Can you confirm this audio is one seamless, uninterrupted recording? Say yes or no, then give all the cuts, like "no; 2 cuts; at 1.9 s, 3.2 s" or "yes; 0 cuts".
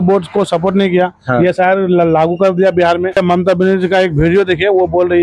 no; 1 cut; at 3.2 s